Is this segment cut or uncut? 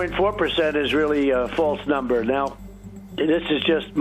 cut